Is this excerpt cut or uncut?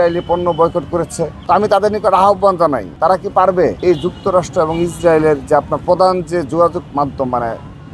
cut